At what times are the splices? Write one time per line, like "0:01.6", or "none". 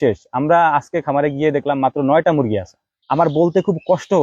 0:02.9